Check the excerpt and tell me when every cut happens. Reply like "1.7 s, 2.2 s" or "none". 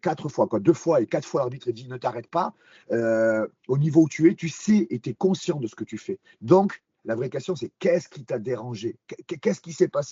none